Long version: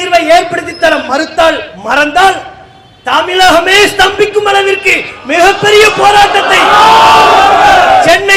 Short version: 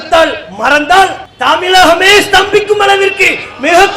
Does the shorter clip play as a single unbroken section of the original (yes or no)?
no